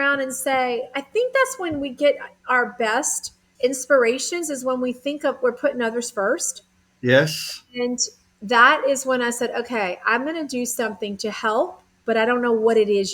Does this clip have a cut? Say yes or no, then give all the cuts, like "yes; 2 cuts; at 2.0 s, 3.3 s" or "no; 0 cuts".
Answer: no; 0 cuts